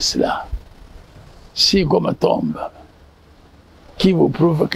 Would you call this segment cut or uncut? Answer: uncut